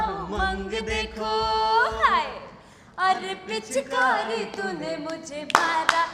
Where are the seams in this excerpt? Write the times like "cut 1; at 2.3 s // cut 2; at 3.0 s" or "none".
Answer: none

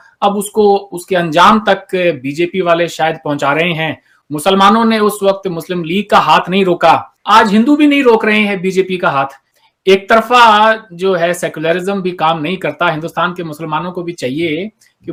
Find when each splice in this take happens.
none

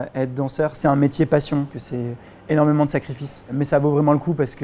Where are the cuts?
cut 1; at 0.8 s // cut 2; at 1.7 s // cut 3; at 3.6 s

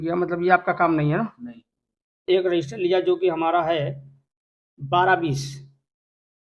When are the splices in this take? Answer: cut 1; at 2.2 s

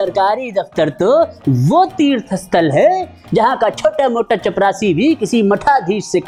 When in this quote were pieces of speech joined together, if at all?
none

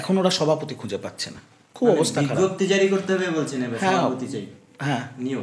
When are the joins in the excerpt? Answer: none

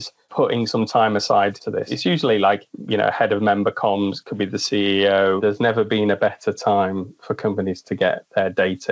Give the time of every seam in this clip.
cut 1; at 1.9 s // cut 2; at 5.4 s

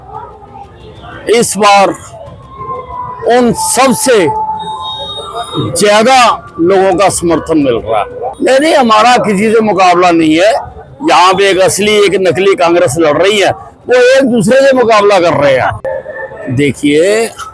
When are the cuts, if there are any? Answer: cut 1; at 8.2 s // cut 2; at 15.8 s

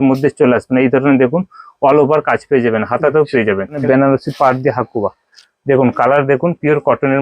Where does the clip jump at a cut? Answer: cut 1; at 3.8 s

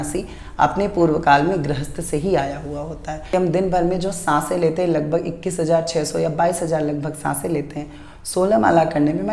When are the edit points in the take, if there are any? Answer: cut 1; at 3.2 s

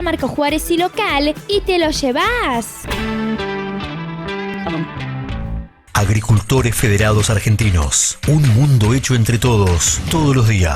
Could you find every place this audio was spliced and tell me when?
cut 1; at 5.8 s

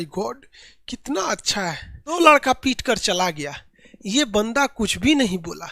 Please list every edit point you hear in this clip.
cut 1; at 2.2 s

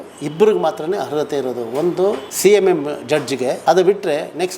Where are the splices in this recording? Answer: cut 1; at 3.6 s

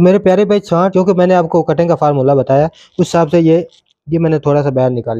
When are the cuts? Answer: cut 1; at 0.9 s

